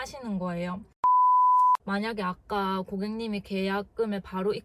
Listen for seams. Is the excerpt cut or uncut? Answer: cut